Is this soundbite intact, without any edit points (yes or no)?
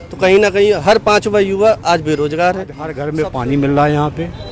no